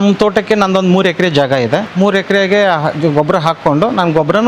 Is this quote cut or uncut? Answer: uncut